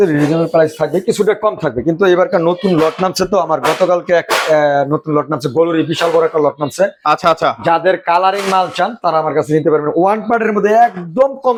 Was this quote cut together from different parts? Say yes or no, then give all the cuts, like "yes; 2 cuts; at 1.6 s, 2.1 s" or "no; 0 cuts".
no; 0 cuts